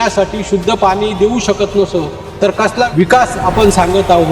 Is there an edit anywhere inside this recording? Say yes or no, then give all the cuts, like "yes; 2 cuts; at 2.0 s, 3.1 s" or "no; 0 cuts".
yes; 1 cut; at 2.9 s